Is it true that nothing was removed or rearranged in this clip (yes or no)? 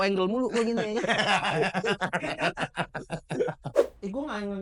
no